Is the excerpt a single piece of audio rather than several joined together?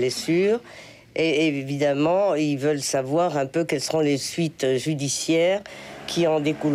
yes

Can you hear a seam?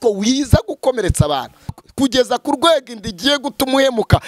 yes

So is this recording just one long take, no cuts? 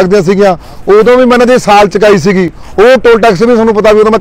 yes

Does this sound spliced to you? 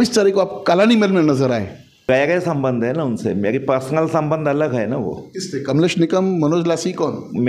yes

